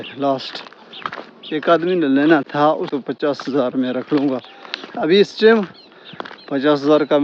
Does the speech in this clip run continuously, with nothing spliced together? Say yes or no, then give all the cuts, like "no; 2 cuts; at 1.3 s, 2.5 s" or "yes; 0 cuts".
no; 1 cut; at 2.9 s